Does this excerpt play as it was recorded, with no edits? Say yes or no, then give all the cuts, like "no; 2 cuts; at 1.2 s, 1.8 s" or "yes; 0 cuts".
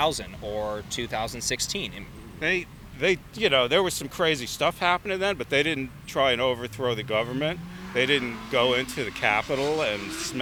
yes; 0 cuts